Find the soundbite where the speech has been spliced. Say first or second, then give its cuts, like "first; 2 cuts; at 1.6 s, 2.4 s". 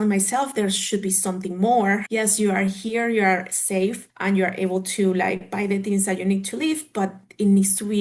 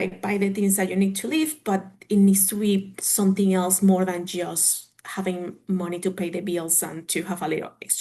first; 2 cuts; at 2.1 s, 4.1 s